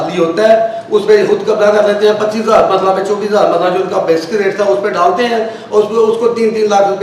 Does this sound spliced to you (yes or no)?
no